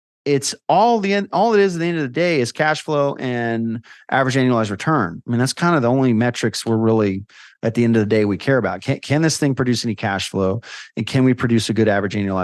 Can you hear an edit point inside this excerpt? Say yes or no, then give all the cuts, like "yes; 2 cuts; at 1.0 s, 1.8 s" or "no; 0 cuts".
no; 0 cuts